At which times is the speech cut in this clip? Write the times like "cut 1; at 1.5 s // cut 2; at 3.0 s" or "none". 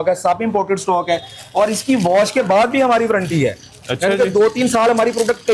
none

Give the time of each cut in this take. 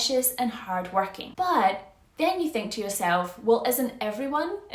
cut 1; at 1.2 s

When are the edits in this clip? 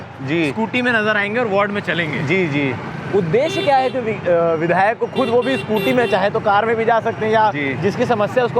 none

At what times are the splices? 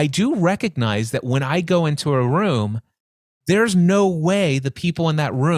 none

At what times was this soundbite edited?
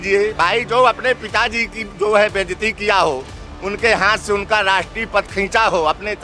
none

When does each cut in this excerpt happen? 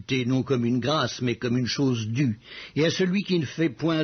cut 1; at 2.5 s

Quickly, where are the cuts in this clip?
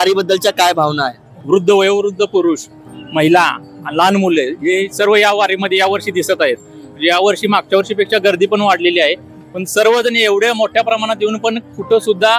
cut 1; at 1.3 s

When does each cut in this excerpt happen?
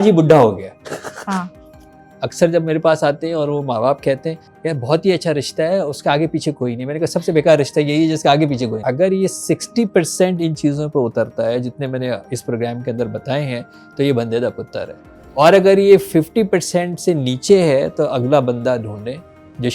cut 1; at 2.0 s // cut 2; at 8.8 s

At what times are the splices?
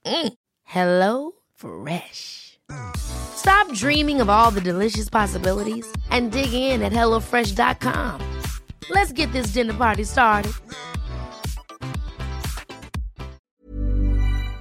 cut 1; at 13.5 s

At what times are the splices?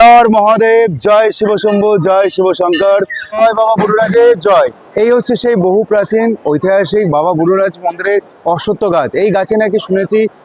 cut 1; at 3.4 s

